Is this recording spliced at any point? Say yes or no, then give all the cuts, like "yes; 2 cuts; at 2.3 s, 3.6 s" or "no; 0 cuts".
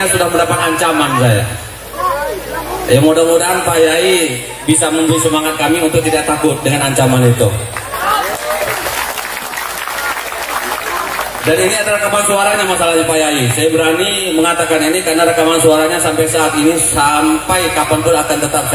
no; 0 cuts